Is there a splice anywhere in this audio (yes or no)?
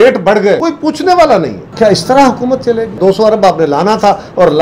yes